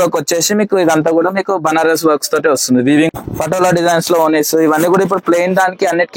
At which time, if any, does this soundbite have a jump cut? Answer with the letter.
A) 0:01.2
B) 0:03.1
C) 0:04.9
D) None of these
B